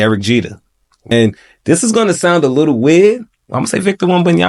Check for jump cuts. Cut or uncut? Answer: cut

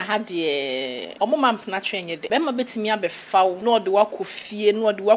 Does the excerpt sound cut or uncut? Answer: cut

